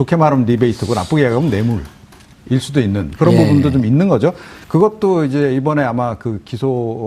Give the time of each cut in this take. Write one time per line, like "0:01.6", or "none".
0:01.3